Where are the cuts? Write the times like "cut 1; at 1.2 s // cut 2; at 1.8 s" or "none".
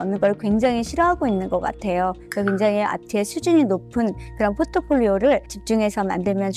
none